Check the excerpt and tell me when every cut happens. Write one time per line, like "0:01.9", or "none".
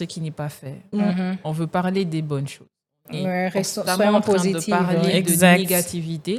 none